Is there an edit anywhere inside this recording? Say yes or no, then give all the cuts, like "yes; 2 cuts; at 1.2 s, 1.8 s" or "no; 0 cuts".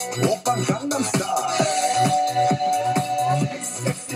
yes; 1 cut; at 1.6 s